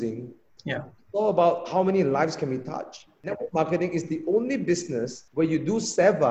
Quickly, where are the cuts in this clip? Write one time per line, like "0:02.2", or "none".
0:03.3
0:05.2